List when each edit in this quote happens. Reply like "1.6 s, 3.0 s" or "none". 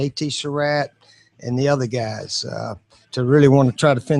3.1 s